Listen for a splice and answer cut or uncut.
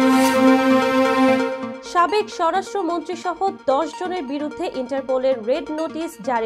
cut